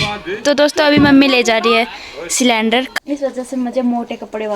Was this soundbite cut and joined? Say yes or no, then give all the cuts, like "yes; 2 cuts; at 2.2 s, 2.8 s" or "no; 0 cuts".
yes; 1 cut; at 2.9 s